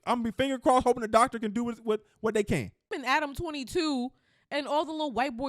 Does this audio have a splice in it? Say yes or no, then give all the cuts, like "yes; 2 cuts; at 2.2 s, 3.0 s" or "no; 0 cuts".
yes; 1 cut; at 2.9 s